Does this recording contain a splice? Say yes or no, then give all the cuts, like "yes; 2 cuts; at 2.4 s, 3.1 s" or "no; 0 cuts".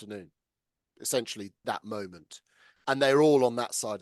yes; 1 cut; at 1.6 s